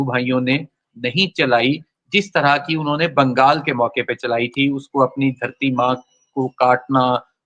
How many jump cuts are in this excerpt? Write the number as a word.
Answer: zero